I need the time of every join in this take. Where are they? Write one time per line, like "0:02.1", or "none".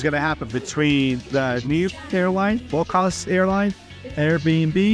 none